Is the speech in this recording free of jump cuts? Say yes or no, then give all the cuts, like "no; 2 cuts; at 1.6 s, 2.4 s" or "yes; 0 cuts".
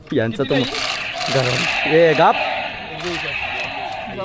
yes; 0 cuts